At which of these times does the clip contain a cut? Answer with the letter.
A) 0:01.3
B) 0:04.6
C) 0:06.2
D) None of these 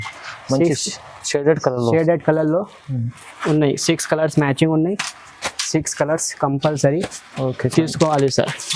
D